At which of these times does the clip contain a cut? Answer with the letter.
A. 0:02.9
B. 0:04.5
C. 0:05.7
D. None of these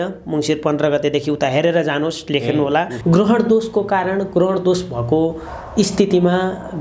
A